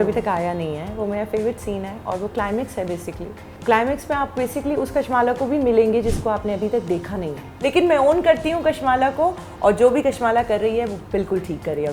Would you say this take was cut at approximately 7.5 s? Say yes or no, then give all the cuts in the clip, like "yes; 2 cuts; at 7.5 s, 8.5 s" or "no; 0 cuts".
yes; 2 cuts; at 3.5 s, 7.5 s